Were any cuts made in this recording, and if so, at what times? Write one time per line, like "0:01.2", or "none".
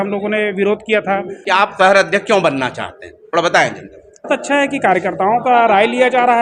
0:01.3
0:04.3